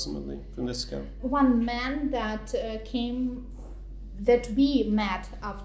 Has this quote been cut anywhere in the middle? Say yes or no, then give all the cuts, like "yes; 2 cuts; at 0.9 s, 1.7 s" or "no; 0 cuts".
yes; 1 cut; at 1.2 s